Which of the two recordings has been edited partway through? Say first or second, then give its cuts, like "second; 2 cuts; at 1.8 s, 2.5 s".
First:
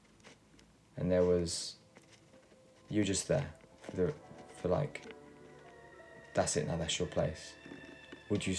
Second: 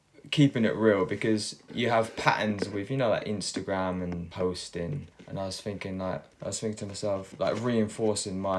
second; 5 cuts; at 1.6 s, 4.3 s, 5.1 s, 6.3 s, 7.3 s